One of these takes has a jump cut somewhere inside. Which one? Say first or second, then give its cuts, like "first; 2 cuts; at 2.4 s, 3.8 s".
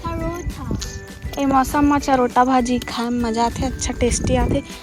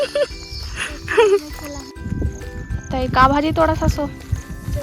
second; 1 cut; at 1.9 s